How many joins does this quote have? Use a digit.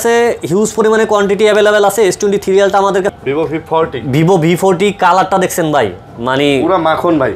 1